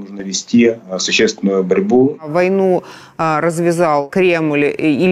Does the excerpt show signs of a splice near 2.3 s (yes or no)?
yes